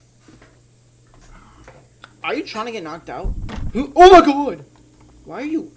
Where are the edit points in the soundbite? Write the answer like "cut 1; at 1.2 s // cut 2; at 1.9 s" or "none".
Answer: cut 1; at 1.9 s